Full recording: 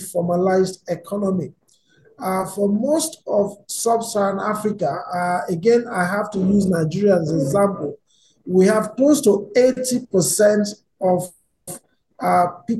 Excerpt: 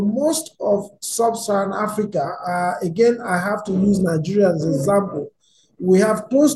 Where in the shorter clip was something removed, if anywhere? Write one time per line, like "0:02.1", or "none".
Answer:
none